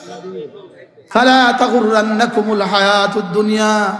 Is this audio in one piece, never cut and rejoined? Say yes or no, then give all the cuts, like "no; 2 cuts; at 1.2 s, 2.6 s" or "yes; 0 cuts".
no; 1 cut; at 1.2 s